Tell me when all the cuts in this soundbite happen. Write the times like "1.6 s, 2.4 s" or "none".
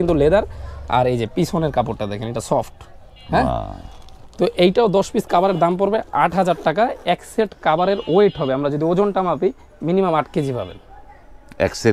none